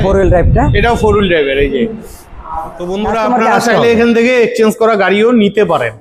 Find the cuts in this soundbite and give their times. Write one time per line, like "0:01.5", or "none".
0:02.8